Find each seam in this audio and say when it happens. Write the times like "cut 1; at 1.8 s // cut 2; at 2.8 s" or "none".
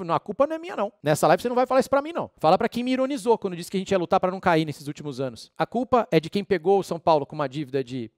cut 1; at 1.0 s // cut 2; at 2.2 s // cut 3; at 5.5 s